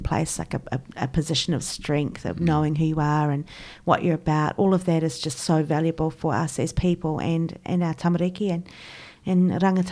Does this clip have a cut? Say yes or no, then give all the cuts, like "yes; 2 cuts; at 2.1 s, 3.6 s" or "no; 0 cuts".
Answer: no; 0 cuts